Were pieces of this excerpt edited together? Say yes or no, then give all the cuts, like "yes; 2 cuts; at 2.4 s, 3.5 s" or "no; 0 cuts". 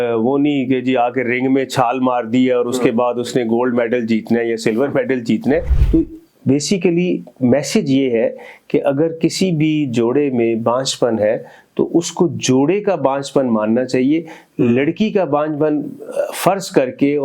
yes; 1 cut; at 5.8 s